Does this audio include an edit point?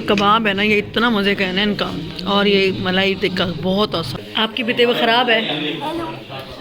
yes; 1 cut; at 4.2 s

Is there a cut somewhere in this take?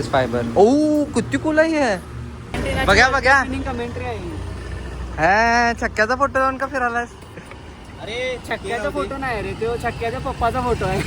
yes; 1 cut; at 2.4 s

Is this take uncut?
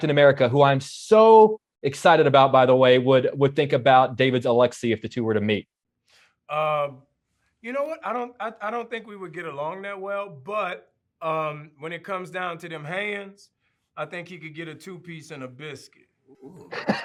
yes; 0 cuts

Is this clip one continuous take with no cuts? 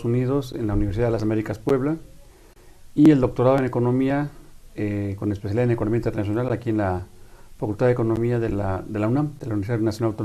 yes; 0 cuts

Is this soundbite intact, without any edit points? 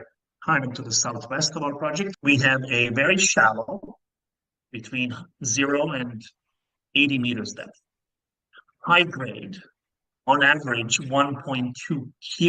no; 1 cut; at 2.1 s

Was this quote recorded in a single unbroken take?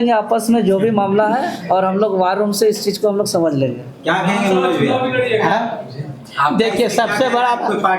yes; 0 cuts

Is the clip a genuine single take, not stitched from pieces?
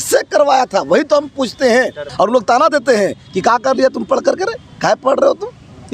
no; 1 cut; at 2.0 s

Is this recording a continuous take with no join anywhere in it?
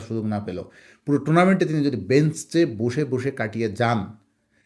yes; 0 cuts

